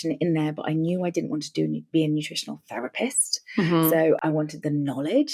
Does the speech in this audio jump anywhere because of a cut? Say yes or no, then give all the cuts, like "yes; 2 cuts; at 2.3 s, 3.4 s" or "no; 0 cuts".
yes; 1 cut; at 4.2 s